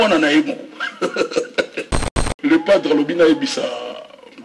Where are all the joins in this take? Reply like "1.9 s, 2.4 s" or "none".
2.2 s